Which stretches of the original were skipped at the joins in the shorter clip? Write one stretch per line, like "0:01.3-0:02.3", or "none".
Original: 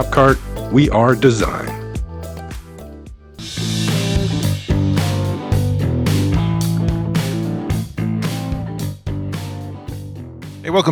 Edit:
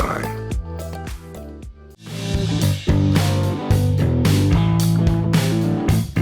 0:03.6-0:03.9